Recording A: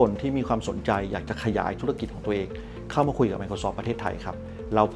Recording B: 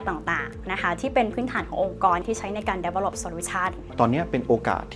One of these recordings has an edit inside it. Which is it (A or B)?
B